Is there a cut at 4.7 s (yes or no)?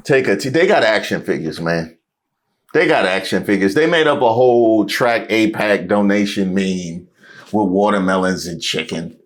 no